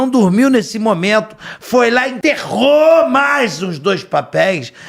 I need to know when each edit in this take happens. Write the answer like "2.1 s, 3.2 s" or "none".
2.1 s